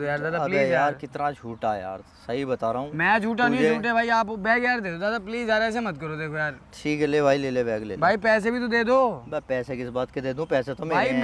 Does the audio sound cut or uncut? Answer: uncut